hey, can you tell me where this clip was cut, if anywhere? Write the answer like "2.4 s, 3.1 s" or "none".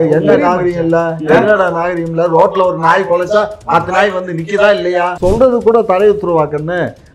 5.1 s